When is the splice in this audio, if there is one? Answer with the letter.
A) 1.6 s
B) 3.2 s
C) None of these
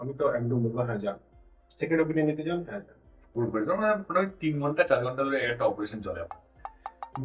B